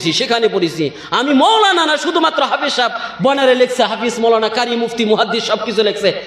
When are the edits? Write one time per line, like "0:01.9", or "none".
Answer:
none